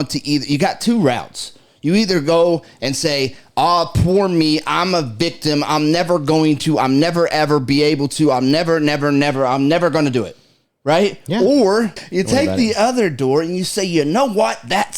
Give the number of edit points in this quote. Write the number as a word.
one